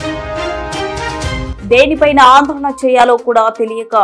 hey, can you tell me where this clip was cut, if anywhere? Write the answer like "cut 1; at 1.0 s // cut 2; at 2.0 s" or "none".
none